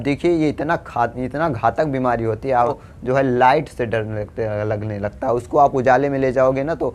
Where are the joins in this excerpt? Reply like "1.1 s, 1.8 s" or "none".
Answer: 2.8 s